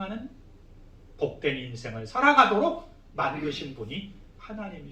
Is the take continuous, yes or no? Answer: yes